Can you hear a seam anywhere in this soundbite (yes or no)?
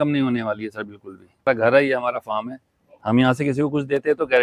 yes